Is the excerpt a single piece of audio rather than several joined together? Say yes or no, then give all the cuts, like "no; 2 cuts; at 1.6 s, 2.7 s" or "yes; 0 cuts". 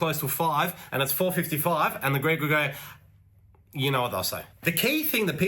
no; 1 cut; at 4.4 s